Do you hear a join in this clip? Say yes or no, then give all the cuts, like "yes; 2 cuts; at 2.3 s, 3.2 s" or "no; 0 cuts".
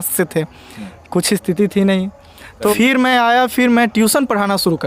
yes; 1 cut; at 2.7 s